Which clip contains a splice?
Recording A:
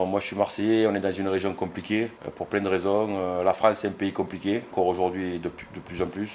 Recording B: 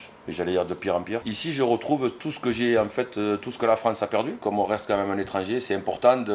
B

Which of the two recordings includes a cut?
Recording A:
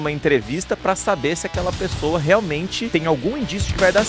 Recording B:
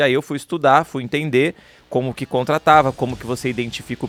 A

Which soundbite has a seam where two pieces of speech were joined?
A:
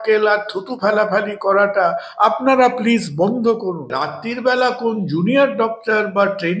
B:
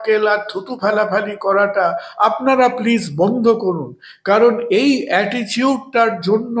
A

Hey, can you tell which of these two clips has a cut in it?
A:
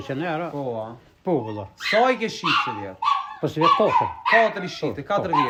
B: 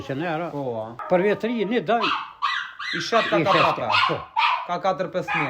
B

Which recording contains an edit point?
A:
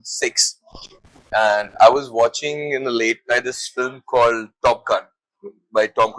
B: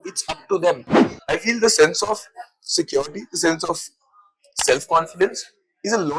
B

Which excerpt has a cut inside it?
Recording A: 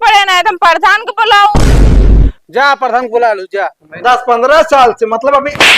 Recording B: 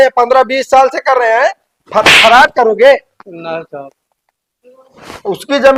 A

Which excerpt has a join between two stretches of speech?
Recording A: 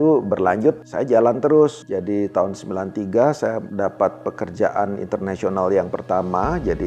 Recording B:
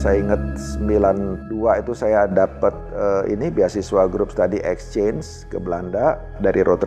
A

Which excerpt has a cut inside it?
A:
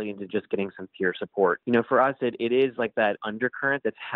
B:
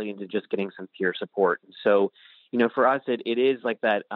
A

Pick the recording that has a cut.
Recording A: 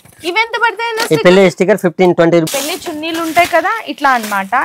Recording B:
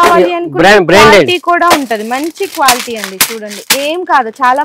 A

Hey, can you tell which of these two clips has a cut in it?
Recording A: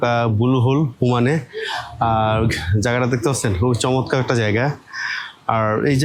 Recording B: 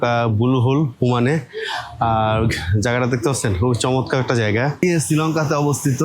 B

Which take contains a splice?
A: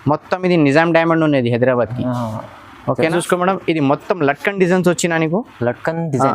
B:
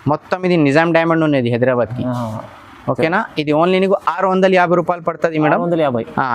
A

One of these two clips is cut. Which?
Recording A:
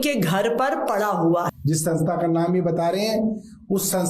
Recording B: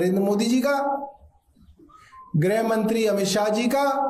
A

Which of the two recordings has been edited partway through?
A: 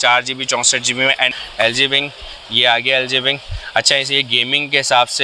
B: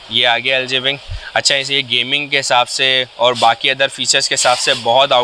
A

